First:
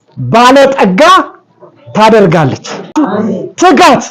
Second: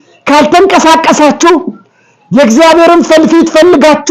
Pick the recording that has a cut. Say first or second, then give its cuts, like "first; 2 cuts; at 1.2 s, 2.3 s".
first; 1 cut; at 2.9 s